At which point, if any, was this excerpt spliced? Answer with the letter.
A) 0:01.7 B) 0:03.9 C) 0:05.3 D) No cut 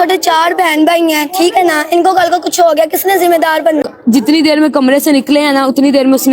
B